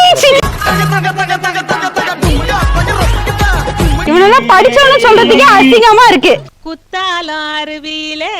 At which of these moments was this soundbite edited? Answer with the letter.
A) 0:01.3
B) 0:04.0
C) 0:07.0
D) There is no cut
B